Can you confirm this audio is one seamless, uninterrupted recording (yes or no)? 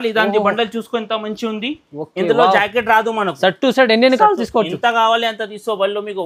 yes